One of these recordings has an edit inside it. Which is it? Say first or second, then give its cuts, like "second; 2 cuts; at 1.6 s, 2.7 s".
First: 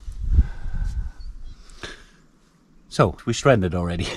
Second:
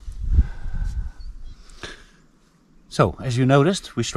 first; 1 cut; at 3.2 s